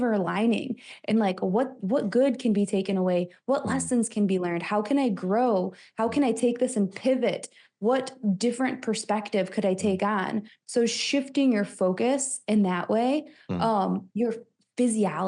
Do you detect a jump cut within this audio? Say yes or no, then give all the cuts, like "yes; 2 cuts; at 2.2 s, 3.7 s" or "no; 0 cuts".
no; 0 cuts